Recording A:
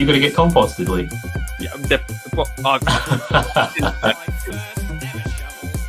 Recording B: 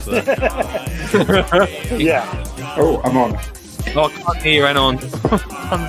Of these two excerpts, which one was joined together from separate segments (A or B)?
A